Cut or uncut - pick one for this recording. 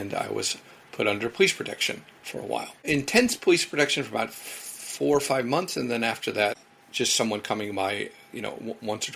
cut